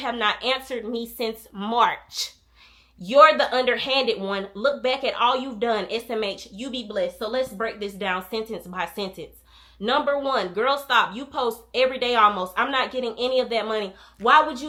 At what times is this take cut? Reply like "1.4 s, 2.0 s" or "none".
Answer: none

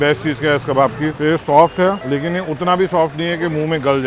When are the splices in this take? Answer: 1.1 s, 2.0 s

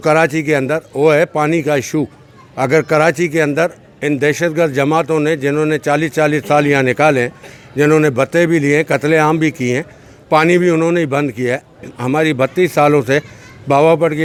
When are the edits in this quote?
none

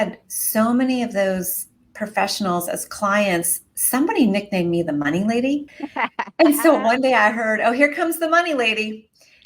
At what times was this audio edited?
5.8 s

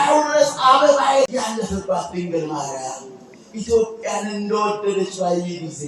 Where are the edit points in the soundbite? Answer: 1.3 s

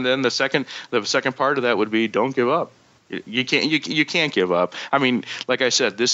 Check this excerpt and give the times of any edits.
2.8 s

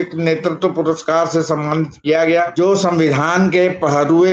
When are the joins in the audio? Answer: 2.5 s

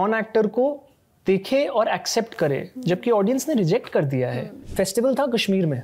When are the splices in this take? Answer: 4.6 s

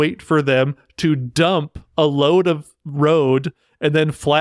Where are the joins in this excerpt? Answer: none

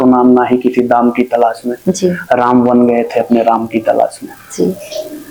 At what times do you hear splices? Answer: none

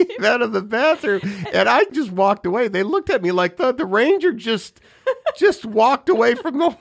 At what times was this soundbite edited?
1.9 s

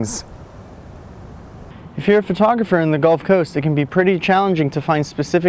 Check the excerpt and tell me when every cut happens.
1.7 s

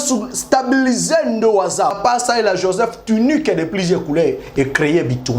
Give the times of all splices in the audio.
2.0 s

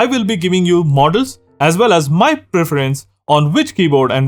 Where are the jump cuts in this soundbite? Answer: none

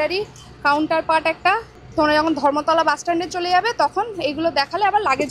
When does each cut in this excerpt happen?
1.7 s

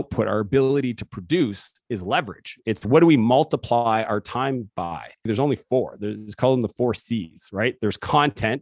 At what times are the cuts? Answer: 5.3 s

